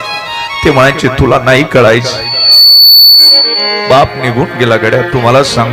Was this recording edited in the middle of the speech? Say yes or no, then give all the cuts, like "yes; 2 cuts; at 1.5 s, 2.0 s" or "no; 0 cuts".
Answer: no; 0 cuts